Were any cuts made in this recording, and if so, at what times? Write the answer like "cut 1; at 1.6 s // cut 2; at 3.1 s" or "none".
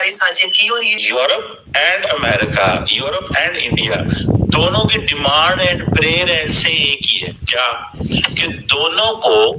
cut 1; at 1.0 s